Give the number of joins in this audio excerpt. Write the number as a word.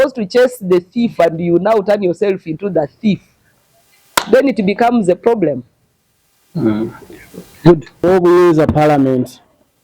zero